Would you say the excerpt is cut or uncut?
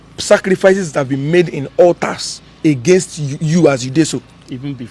uncut